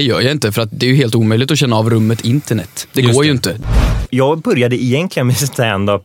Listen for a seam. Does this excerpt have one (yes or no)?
yes